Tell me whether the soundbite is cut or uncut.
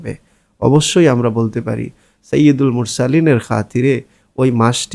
uncut